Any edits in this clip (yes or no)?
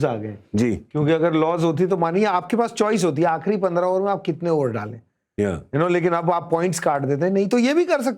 no